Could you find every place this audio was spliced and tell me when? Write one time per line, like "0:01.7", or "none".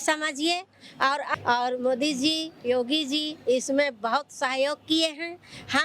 0:01.3